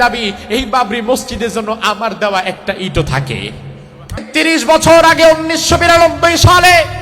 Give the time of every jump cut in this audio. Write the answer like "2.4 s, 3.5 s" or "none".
4.3 s